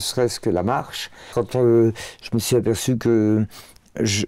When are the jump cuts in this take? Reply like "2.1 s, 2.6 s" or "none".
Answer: 1.3 s

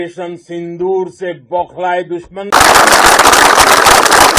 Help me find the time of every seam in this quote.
2.5 s

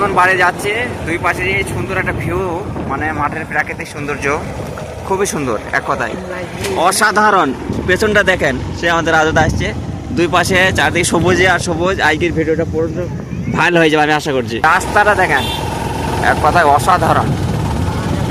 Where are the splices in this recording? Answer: none

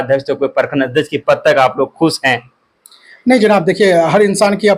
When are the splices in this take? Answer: none

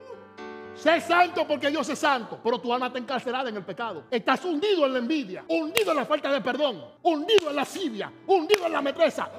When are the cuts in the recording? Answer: 4.0 s, 5.4 s, 6.9 s

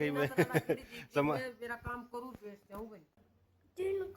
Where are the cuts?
3.2 s

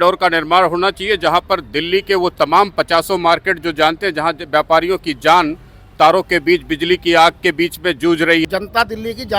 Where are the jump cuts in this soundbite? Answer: 8.4 s

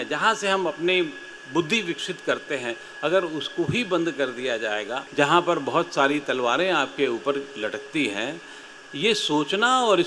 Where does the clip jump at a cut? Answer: 5.0 s

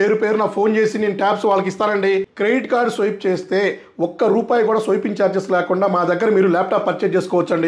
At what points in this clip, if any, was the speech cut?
2.3 s

